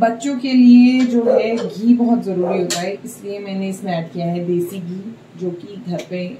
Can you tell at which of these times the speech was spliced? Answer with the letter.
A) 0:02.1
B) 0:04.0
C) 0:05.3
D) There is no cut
D